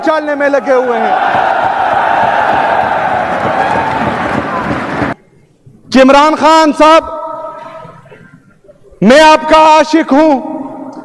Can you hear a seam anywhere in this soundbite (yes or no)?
yes